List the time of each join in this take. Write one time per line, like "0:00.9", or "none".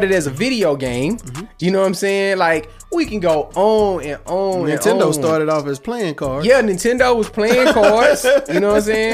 none